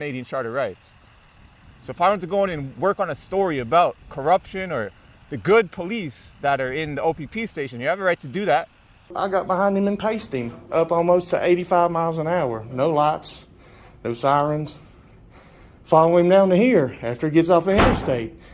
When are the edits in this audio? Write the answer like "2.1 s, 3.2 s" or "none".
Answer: 9.2 s